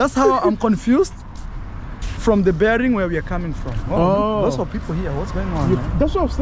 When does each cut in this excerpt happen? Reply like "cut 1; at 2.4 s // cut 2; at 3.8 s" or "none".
none

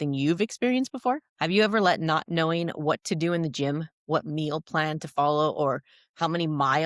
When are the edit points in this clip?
cut 1; at 1.3 s

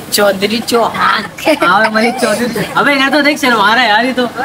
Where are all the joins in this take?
none

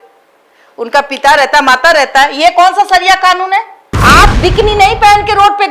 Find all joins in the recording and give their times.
cut 1; at 4.0 s

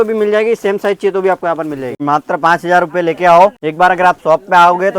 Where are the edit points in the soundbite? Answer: cut 1; at 2.0 s // cut 2; at 3.6 s

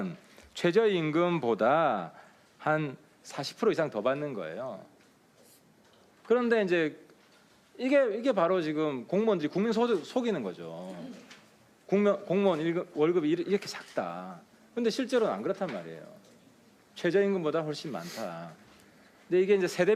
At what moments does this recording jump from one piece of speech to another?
cut 1; at 8.7 s

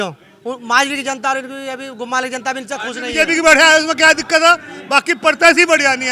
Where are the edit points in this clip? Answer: cut 1; at 3.1 s

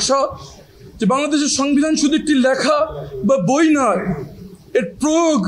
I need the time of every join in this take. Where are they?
none

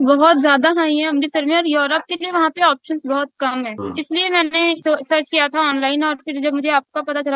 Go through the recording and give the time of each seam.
cut 1; at 3.8 s // cut 2; at 4.8 s

